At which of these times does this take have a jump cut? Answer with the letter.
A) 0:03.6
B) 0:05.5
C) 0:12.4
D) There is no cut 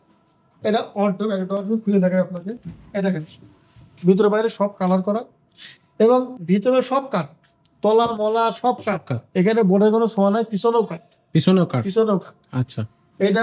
D